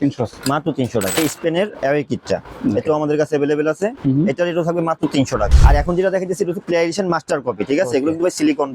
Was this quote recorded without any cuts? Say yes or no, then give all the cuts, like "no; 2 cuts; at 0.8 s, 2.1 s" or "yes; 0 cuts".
no; 2 cuts; at 1.2 s, 5.5 s